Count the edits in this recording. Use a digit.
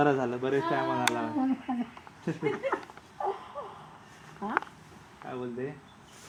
0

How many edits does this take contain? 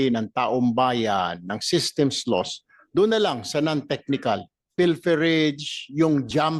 1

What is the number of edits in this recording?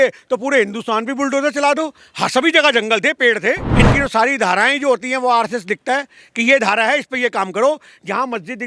1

